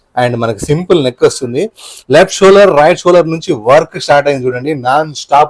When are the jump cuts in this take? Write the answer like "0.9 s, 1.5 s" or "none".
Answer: none